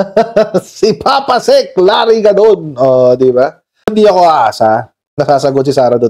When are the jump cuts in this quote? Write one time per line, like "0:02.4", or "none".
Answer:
0:03.9